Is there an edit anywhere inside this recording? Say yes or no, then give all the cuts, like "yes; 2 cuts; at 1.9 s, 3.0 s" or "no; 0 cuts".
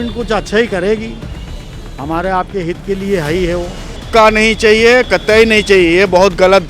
yes; 1 cut; at 4.0 s